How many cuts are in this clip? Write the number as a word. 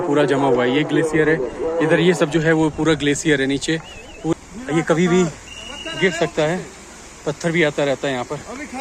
one